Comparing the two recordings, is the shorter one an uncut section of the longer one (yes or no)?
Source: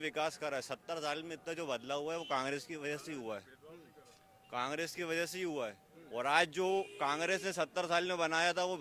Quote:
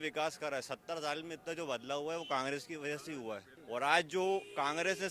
no